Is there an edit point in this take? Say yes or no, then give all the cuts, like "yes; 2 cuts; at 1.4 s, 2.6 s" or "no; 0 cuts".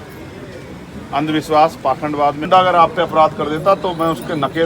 yes; 1 cut; at 2.5 s